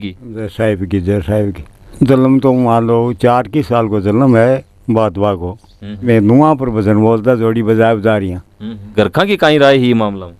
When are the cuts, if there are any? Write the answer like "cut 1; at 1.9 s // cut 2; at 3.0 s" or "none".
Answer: cut 1; at 1.7 s // cut 2; at 6.0 s // cut 3; at 8.9 s